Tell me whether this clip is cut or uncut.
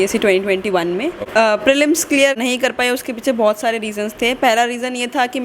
cut